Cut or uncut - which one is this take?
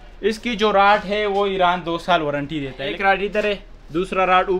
cut